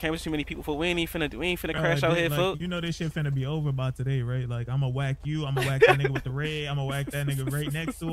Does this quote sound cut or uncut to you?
uncut